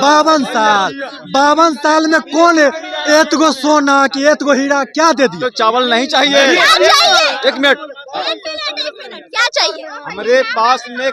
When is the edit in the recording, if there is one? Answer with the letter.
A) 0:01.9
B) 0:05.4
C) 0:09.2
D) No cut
B